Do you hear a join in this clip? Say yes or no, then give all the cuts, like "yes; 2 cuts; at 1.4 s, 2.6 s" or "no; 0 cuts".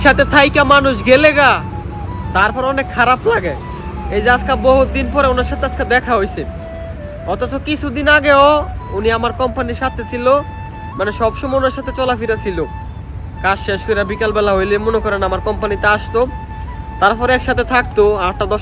no; 0 cuts